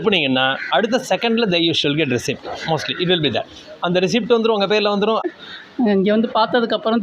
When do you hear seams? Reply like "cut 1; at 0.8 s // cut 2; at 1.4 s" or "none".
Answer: cut 1; at 5.2 s